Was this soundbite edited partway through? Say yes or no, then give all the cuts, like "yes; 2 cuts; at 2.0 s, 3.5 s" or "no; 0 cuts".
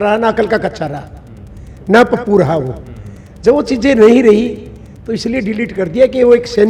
no; 0 cuts